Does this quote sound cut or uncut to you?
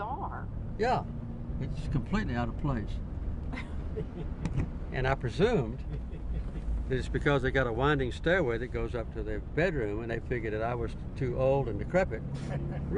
uncut